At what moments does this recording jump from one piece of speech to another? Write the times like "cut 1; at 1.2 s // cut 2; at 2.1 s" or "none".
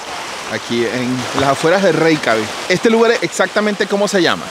cut 1; at 2.6 s